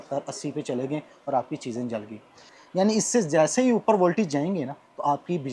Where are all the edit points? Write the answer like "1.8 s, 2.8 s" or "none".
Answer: 2.6 s